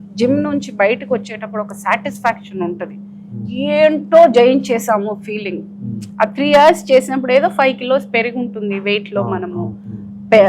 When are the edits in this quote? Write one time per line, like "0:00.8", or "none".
none